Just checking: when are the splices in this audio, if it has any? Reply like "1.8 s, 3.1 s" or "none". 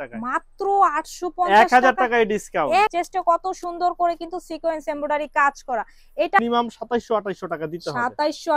2.9 s, 6.4 s